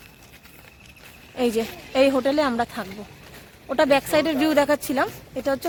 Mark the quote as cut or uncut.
uncut